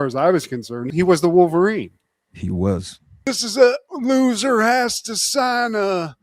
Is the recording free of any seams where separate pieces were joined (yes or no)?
no